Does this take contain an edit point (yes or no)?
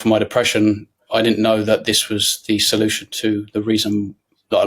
no